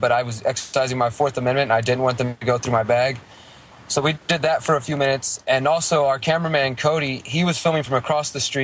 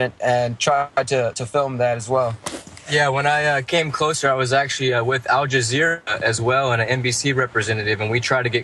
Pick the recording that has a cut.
second; 1 cut; at 2.9 s

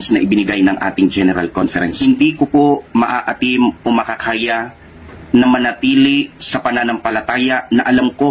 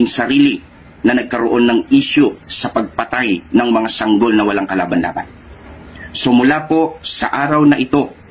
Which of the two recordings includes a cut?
first; 2 cuts; at 1.9 s, 6.0 s

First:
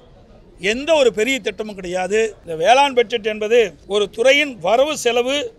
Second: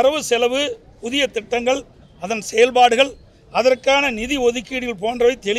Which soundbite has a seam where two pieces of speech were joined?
first; 2 cuts; at 2.4 s, 3.8 s

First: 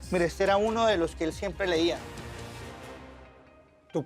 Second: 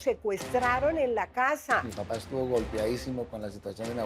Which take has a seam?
second; 1 cut; at 2.0 s

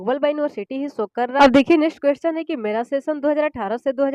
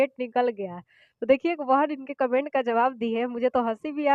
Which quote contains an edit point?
first; 1 cut; at 1.4 s

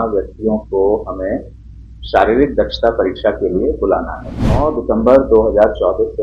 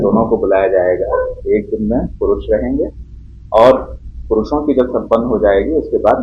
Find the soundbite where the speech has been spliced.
first; 1 cut; at 4.6 s

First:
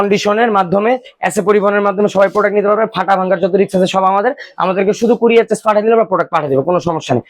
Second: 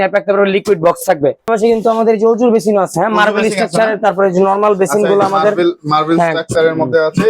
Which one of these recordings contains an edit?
second; 1 cut; at 1.5 s

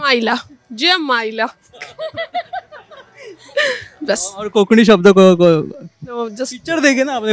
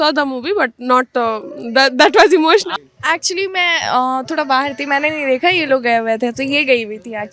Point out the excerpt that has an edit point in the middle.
second; 1 cut; at 2.7 s

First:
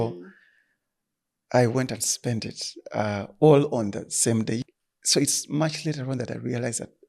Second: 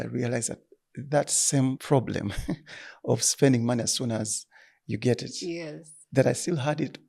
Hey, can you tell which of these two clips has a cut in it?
first; 1 cut; at 4.6 s

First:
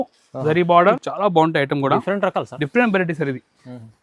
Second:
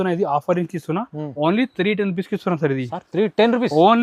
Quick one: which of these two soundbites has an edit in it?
first; 1 cut; at 1.1 s

